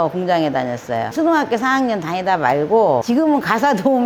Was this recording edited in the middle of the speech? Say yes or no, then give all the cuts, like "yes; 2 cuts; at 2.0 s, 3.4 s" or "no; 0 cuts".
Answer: yes; 2 cuts; at 1.1 s, 3.0 s